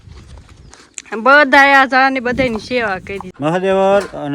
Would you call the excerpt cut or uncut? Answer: cut